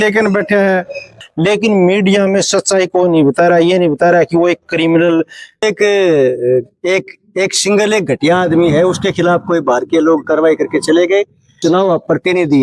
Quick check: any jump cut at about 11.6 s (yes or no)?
yes